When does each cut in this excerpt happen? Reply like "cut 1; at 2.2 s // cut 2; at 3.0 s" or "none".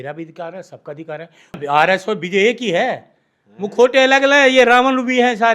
cut 1; at 1.6 s